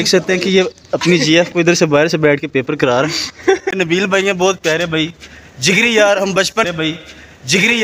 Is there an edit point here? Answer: yes; 2 cuts; at 3.7 s, 6.7 s

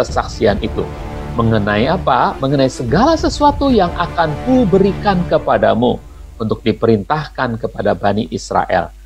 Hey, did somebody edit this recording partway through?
no; 0 cuts

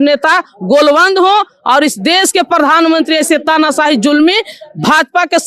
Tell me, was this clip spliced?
no; 0 cuts

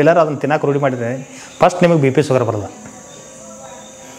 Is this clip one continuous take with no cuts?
yes; 0 cuts

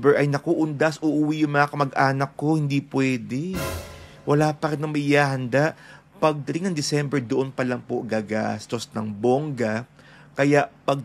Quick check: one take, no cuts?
yes; 0 cuts

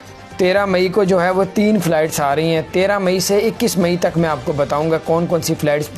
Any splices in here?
no; 0 cuts

